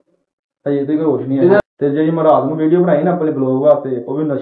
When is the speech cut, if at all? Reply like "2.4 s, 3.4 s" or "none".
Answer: 1.6 s